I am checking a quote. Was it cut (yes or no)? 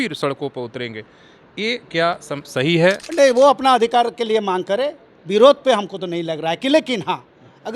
yes